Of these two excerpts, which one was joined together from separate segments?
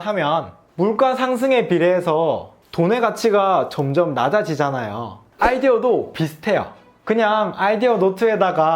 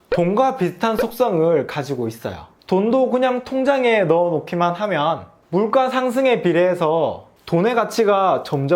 first; 1 cut; at 5.2 s

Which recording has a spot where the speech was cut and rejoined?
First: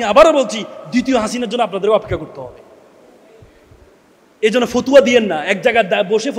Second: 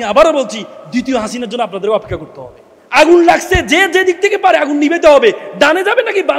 second; 1 cut; at 2.8 s

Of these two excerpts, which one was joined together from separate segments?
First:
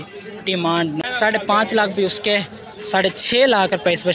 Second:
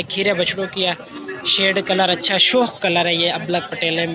first; 1 cut; at 1.0 s

